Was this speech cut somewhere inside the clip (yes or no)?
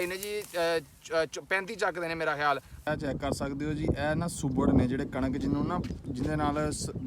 yes